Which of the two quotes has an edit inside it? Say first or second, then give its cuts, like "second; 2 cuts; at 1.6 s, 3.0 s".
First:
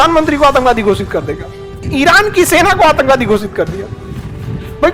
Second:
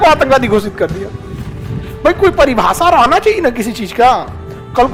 first; 1 cut; at 1.8 s